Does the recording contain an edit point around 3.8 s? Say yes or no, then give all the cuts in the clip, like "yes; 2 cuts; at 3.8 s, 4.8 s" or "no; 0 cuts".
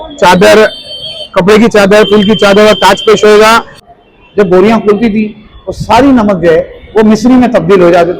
yes; 1 cut; at 3.8 s